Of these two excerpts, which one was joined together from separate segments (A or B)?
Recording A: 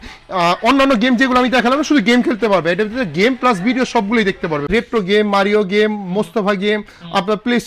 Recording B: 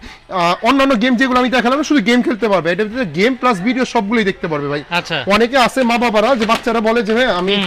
A